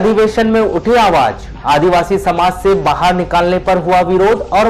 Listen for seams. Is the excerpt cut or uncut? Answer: uncut